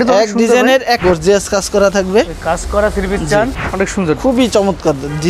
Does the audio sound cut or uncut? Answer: cut